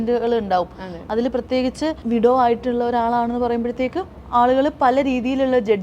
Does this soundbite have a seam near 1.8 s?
no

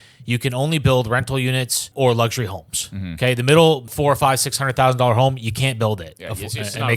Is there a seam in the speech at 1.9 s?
yes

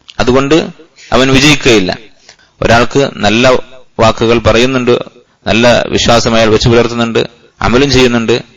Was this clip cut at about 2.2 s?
yes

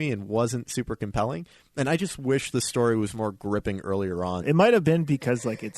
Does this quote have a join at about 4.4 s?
yes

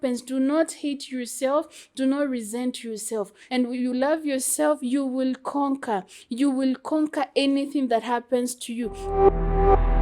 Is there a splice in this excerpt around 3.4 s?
yes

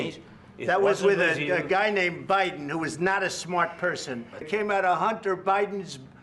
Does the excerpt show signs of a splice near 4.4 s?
yes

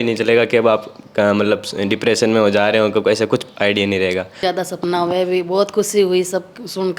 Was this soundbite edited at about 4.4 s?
yes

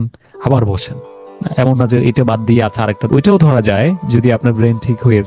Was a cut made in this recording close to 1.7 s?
no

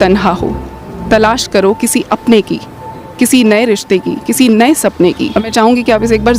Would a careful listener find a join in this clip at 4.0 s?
no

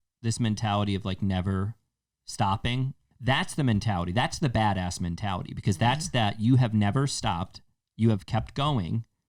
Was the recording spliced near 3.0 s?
yes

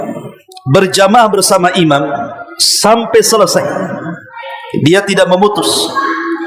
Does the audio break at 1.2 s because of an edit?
no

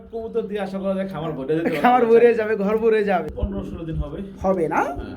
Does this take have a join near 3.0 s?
yes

